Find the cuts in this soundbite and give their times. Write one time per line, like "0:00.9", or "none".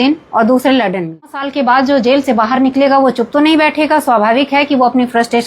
0:01.4

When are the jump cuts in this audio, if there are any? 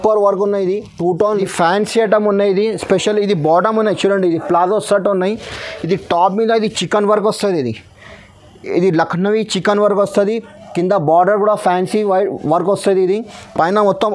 0:01.4

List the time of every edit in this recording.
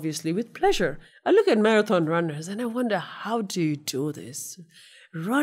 0:01.1

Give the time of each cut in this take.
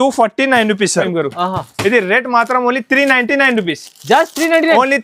0:01.1

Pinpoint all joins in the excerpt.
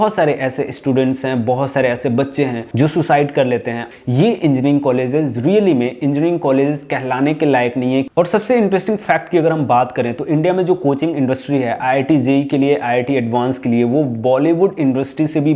0:03.8
0:08.0

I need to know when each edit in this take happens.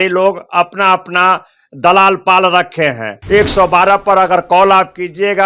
0:03.1

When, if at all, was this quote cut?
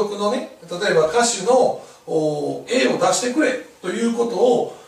none

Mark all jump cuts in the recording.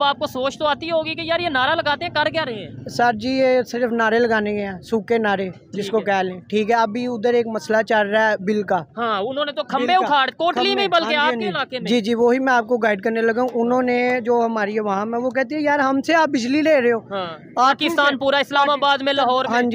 none

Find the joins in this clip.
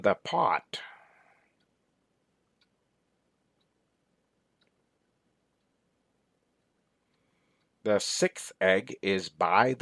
none

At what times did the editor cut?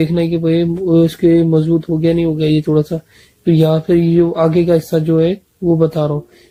none

